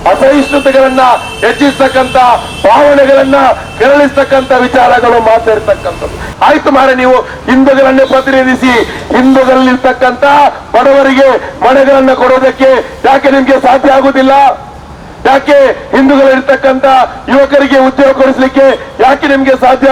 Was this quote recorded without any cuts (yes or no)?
yes